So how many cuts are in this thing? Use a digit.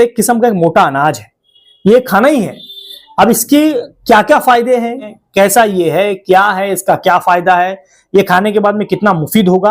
1